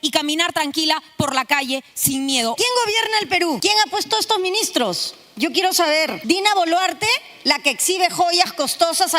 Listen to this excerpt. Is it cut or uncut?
cut